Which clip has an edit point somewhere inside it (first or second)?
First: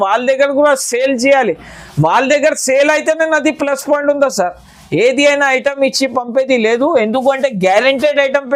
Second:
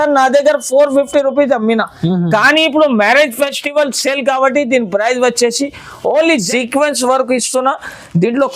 second